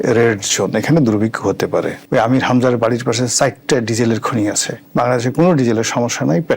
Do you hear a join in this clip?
yes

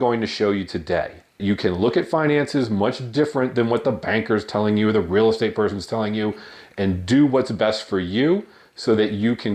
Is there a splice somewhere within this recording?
yes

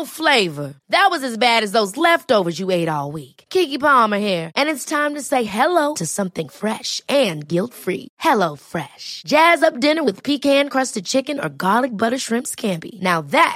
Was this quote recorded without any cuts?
yes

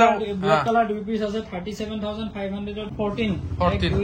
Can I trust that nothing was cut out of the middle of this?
no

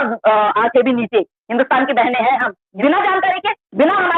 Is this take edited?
yes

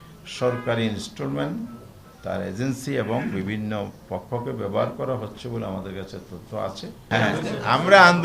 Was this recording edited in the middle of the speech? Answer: yes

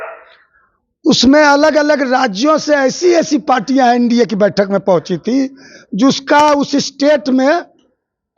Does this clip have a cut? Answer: no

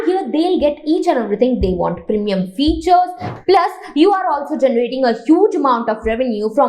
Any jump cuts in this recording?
yes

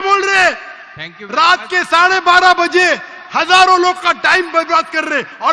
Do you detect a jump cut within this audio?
no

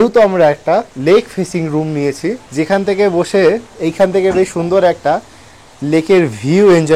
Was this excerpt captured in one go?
no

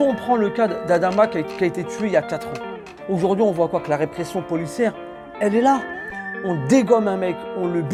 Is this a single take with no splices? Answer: yes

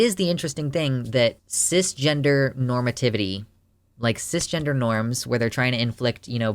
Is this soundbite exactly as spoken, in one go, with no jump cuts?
yes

